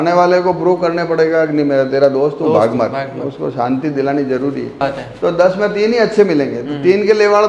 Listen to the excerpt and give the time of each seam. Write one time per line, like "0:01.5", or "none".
0:04.8